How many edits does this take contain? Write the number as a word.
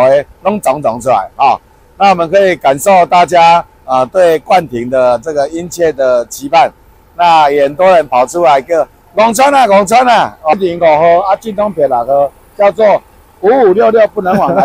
one